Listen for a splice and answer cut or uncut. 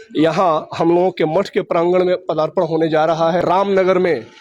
cut